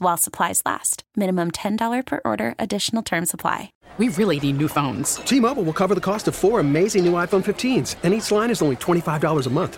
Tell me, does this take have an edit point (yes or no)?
yes